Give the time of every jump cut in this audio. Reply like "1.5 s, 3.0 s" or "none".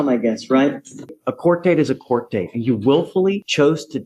1.1 s